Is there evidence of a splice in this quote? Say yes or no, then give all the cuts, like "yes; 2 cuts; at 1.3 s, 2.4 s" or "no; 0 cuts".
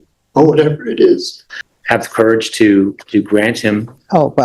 yes; 1 cut; at 1.7 s